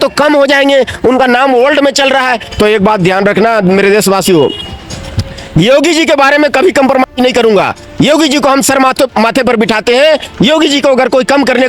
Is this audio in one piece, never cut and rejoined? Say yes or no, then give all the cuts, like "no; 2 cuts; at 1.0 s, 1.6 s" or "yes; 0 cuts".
yes; 0 cuts